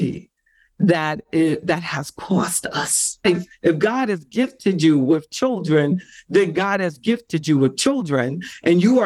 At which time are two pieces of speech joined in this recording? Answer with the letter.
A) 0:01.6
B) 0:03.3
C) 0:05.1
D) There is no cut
B